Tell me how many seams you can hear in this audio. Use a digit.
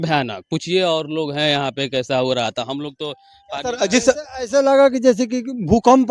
0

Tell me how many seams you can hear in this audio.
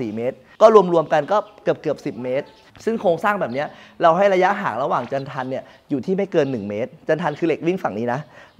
1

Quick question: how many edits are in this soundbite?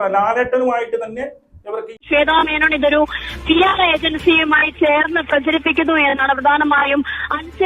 1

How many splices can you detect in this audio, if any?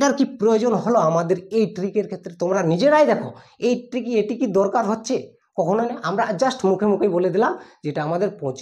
0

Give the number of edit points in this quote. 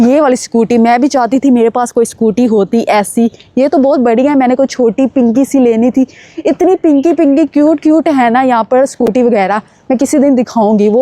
0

